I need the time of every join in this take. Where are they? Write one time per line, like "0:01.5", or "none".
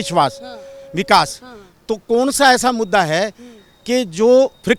none